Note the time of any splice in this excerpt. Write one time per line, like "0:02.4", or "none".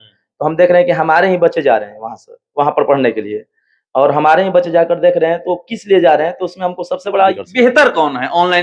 0:07.3